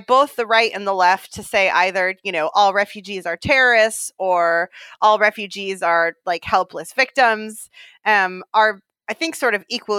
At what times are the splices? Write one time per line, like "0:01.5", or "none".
none